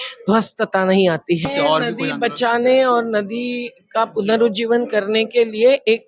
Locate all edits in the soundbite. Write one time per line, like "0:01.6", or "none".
0:01.4